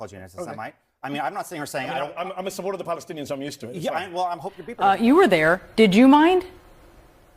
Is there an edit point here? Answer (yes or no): yes